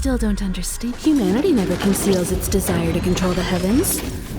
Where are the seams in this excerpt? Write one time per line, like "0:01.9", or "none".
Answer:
0:01.0